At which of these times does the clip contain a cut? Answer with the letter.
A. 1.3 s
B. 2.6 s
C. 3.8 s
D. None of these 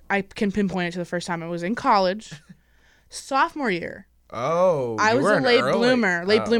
D